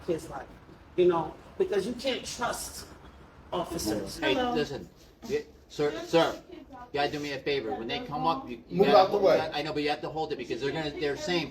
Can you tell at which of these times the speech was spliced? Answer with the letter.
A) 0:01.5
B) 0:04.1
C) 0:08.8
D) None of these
B